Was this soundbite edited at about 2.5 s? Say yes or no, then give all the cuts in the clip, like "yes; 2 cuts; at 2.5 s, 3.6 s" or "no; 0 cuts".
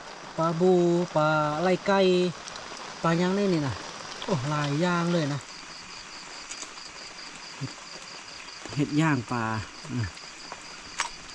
no; 1 cut; at 5.5 s